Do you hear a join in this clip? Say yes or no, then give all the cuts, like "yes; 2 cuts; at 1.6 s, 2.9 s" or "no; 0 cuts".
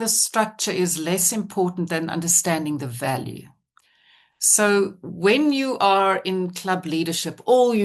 no; 0 cuts